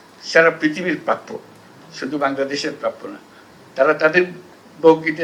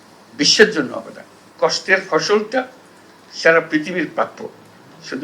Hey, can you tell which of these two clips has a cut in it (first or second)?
second